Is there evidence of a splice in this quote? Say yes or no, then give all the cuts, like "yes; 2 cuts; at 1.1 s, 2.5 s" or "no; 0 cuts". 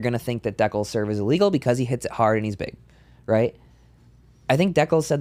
no; 0 cuts